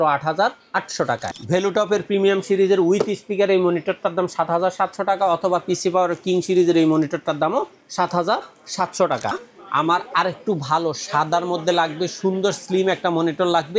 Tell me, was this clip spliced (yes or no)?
yes